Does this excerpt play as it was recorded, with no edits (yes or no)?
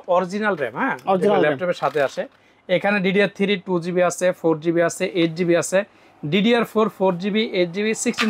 yes